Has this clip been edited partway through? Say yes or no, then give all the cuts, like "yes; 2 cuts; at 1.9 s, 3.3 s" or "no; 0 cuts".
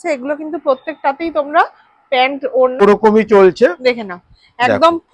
yes; 1 cut; at 2.8 s